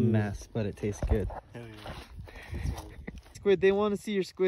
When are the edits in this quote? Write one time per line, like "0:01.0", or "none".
0:03.3